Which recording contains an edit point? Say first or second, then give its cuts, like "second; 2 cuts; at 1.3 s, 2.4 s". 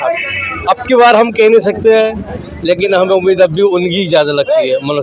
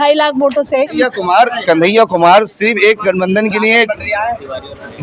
second; 1 cut; at 0.9 s